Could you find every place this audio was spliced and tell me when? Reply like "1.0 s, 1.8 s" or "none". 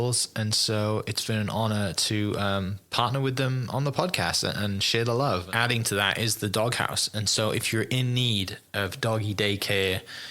5.5 s

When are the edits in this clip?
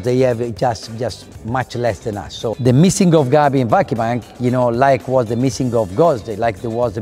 2.5 s

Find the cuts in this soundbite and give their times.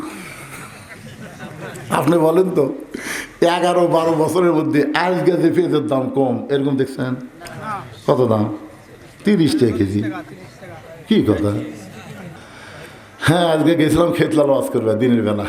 12.4 s

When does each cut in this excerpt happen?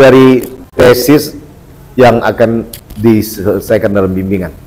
1.1 s, 2.9 s

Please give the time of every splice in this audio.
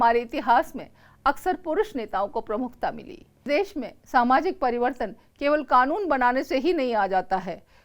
3.4 s

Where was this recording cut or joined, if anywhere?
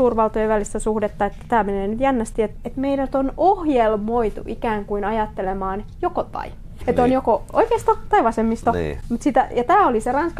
2.5 s, 6.8 s

